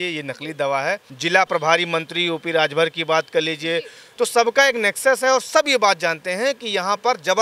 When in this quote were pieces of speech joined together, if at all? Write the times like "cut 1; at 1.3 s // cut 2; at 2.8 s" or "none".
cut 1; at 1.1 s // cut 2; at 4.0 s